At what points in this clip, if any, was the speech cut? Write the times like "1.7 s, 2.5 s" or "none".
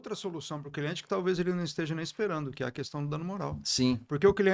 none